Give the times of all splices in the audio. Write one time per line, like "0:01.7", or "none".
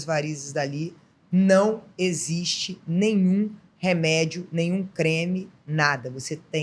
none

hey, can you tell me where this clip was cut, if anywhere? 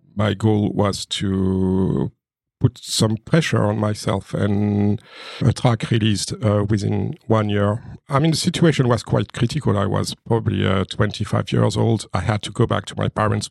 0:05.4
0:08.0
0:12.1

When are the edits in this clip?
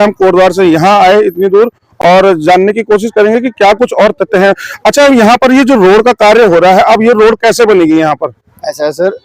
none

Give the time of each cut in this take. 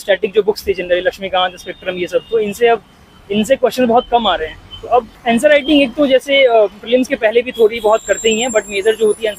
0:05.1

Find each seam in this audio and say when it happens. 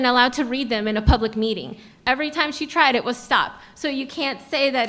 none

